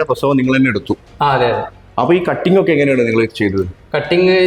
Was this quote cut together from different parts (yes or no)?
no